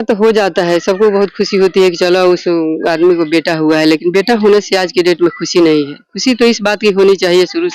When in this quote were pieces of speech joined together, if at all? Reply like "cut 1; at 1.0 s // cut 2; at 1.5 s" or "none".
none